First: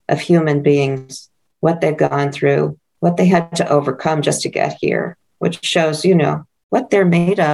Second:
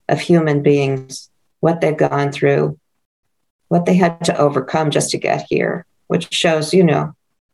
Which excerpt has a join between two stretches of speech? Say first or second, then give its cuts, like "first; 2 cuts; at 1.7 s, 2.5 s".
first; 2 cuts; at 2.8 s, 6.5 s